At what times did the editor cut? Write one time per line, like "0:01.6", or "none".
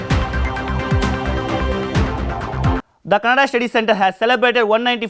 0:02.9